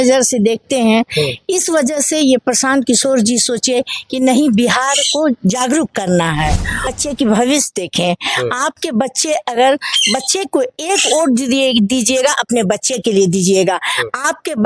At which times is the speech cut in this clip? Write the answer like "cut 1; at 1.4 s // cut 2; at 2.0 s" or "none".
cut 1; at 7.0 s